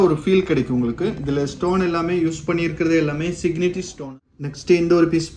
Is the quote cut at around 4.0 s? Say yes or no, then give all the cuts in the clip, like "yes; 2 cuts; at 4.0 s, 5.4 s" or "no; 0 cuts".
yes; 1 cut; at 4.0 s